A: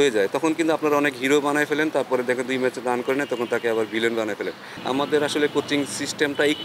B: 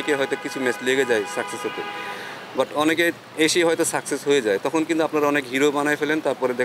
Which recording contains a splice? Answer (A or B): A